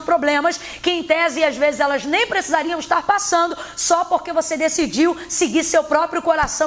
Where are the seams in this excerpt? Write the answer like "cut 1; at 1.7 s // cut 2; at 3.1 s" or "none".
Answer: none

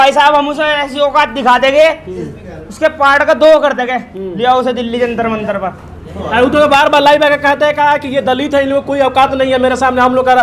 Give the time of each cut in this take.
none

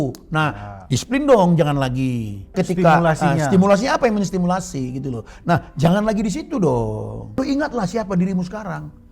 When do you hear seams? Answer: cut 1; at 2.5 s // cut 2; at 7.4 s

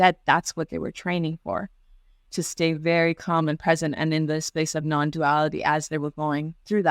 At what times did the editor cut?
none

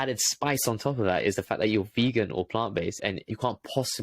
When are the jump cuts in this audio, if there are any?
cut 1; at 3.1 s

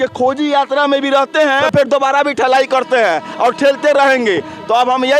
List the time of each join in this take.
cut 1; at 1.6 s

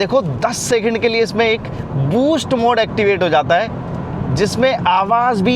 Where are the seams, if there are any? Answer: none

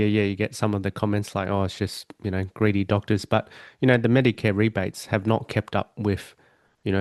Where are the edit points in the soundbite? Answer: none

